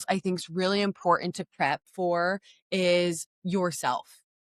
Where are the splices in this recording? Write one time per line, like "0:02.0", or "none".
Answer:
none